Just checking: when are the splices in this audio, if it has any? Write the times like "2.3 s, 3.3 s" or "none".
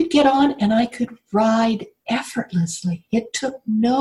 1.9 s